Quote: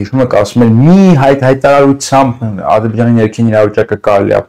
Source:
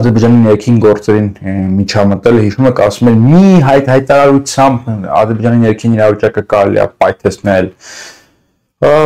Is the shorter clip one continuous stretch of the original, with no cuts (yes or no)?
yes